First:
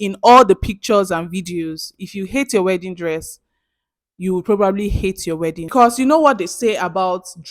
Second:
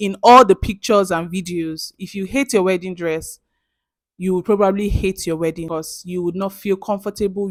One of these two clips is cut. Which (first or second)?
first